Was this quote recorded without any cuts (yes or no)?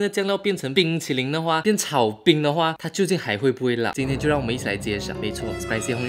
yes